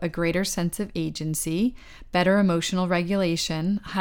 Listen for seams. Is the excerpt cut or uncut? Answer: uncut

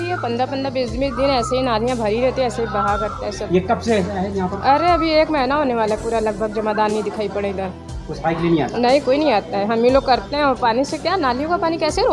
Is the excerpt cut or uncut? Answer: uncut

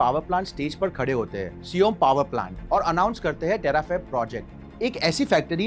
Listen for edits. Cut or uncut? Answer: cut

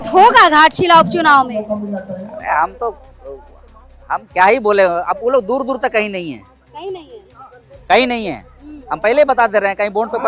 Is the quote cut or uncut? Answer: uncut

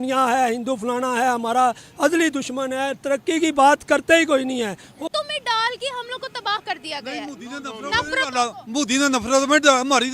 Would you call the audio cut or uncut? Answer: cut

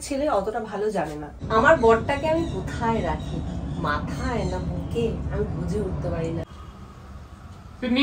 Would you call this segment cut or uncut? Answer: cut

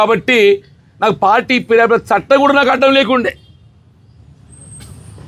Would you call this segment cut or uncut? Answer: uncut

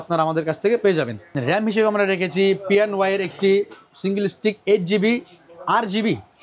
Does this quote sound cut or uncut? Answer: uncut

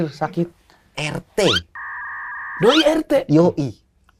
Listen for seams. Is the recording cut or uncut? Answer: uncut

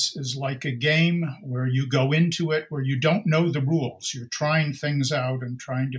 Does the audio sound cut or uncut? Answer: uncut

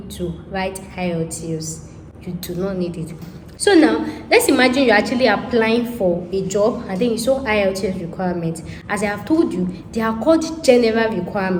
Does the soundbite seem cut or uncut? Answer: uncut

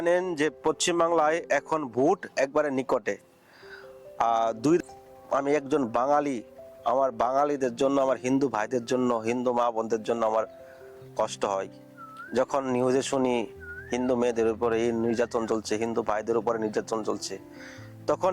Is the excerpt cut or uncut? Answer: cut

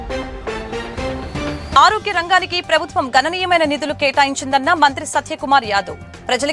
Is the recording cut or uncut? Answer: cut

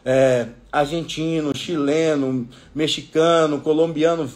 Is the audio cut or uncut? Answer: uncut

